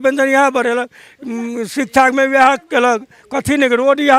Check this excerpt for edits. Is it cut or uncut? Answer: uncut